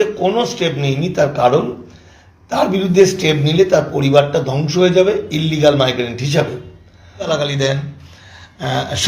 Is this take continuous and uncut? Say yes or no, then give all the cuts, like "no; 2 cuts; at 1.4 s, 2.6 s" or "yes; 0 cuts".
no; 1 cut; at 7.3 s